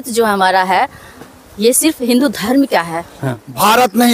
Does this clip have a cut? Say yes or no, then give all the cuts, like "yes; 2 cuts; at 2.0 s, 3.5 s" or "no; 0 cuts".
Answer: yes; 1 cut; at 3.2 s